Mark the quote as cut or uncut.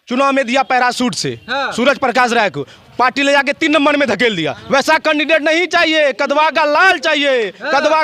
uncut